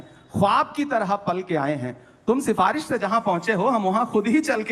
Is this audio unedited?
yes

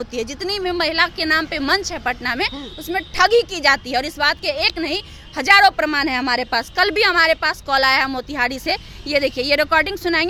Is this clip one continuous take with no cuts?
yes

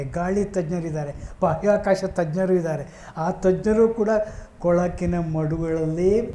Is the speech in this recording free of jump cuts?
yes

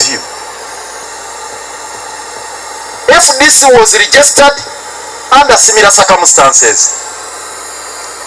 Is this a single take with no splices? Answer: no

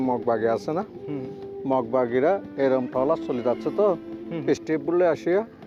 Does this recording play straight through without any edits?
yes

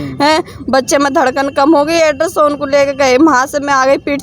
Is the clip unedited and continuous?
yes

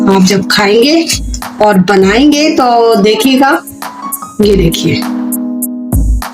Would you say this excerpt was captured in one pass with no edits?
no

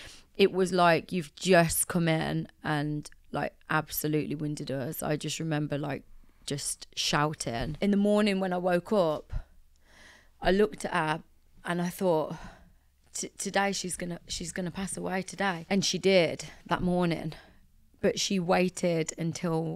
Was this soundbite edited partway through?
yes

